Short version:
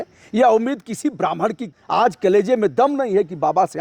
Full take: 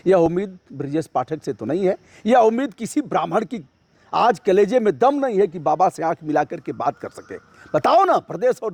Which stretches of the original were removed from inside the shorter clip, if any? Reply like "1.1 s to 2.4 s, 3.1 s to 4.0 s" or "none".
3.6 s to 3.9 s

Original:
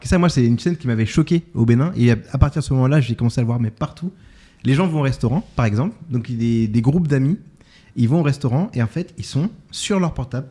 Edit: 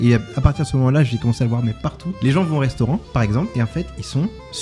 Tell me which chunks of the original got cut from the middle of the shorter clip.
4.0 s to 4.5 s, 6.0 s to 8.7 s

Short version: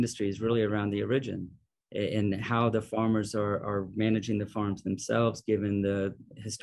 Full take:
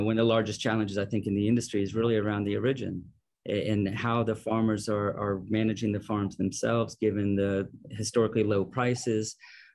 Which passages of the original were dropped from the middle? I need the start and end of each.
none

